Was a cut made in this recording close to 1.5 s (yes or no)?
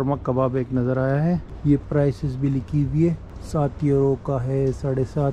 yes